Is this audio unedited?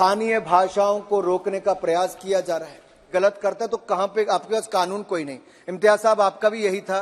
no; 1 cut; at 3.1 s

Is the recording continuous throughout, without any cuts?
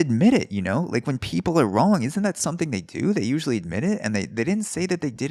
yes; 0 cuts

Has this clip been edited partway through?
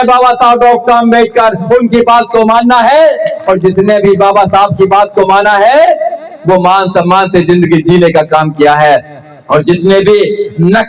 no; 0 cuts

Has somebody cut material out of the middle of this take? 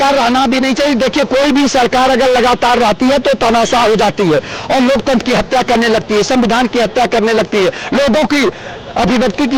no; 0 cuts

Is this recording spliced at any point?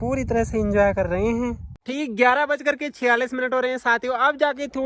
no; 0 cuts

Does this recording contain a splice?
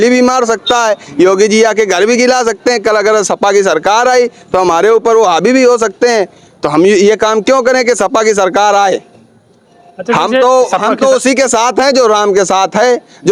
no; 0 cuts

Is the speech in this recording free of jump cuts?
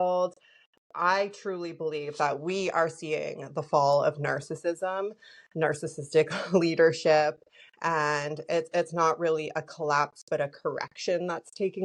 yes; 0 cuts

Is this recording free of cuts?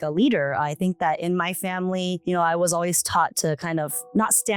yes; 0 cuts

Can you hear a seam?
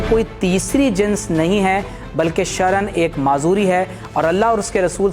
no; 0 cuts

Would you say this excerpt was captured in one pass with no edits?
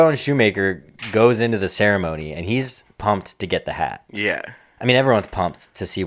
yes; 0 cuts

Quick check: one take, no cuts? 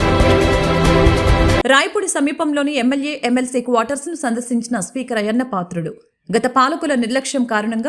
no; 1 cut; at 1.5 s

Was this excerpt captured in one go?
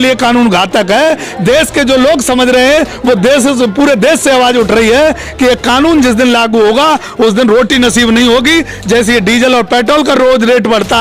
yes; 0 cuts

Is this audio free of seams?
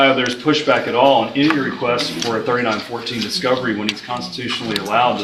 yes; 0 cuts

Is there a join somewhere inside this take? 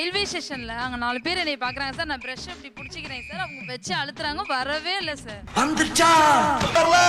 no; 0 cuts

